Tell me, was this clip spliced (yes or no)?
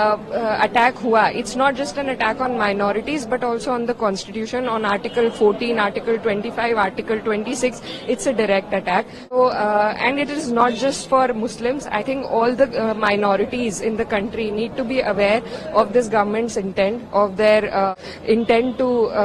yes